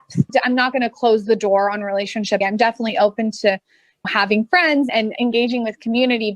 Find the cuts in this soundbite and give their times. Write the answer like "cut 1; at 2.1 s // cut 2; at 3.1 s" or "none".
cut 1; at 2.4 s // cut 2; at 5.2 s